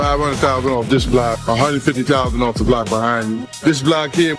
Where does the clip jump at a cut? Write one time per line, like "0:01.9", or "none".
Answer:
0:01.4